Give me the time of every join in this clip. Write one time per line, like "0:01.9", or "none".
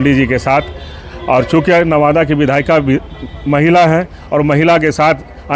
none